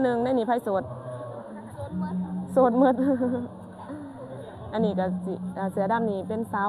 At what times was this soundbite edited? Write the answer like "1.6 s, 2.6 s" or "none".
none